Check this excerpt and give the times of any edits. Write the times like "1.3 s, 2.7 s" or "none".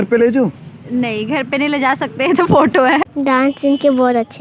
3.1 s